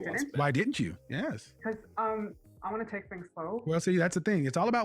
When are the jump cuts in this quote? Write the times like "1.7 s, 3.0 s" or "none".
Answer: none